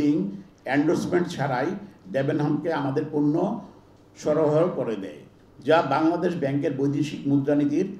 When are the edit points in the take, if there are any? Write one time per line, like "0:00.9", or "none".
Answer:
none